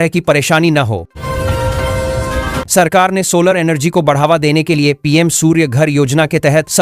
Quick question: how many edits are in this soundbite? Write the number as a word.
two